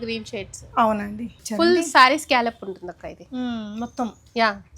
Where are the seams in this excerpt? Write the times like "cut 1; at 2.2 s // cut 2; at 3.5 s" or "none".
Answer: cut 1; at 1.4 s